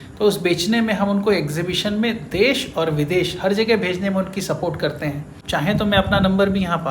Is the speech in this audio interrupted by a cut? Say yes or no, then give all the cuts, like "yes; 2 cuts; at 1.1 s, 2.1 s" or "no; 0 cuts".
yes; 1 cut; at 5.4 s